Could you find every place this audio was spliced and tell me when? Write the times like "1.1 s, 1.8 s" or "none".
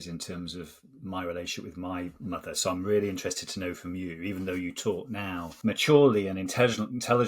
5.5 s